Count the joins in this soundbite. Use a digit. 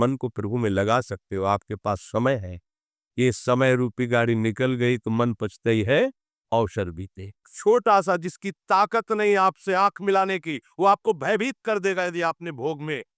1